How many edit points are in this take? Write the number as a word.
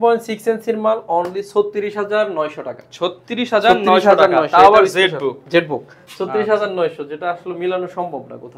zero